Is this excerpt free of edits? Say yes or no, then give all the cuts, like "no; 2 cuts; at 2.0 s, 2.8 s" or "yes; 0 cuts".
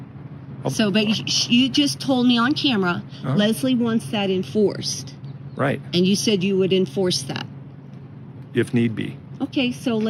yes; 0 cuts